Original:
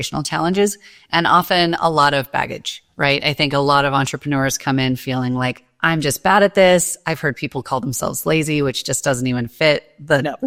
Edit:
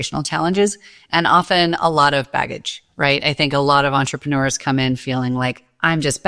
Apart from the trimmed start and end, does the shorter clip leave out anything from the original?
no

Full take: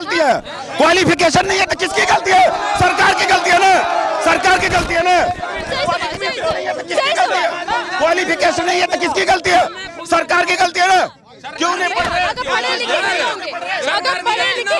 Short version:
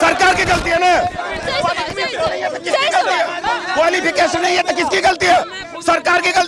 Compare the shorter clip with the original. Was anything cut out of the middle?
no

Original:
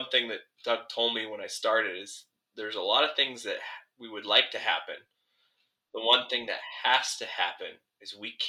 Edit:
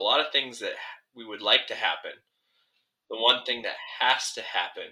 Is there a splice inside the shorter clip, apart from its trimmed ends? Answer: no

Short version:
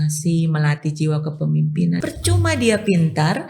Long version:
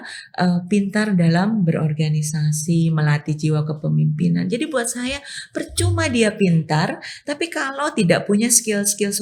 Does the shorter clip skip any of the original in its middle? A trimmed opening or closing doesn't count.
yes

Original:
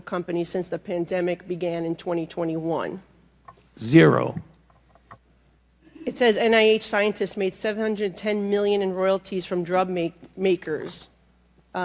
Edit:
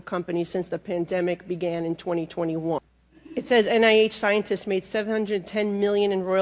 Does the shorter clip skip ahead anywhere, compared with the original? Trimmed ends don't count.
yes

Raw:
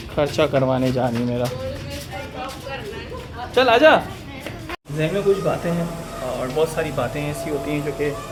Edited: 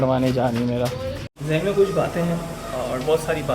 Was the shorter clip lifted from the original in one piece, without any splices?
no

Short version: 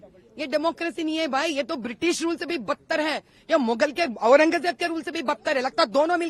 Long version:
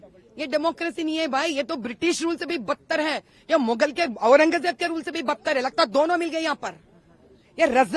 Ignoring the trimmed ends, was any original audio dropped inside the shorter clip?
no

